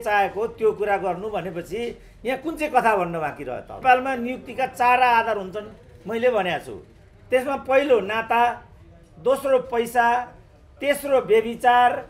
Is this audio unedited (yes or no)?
no